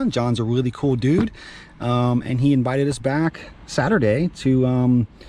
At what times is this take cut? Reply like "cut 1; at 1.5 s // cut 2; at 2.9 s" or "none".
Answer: none